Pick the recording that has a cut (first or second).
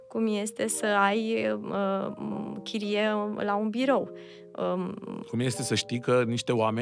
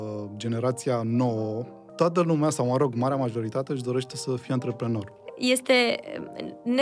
second